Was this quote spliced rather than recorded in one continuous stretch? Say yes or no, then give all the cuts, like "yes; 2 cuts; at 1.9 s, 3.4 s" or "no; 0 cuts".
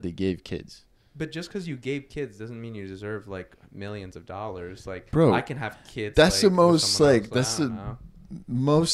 no; 0 cuts